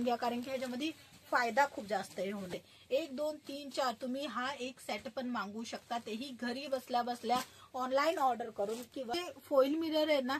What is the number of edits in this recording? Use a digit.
2